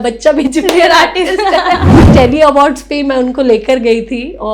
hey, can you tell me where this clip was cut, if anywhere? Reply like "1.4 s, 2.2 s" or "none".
2.0 s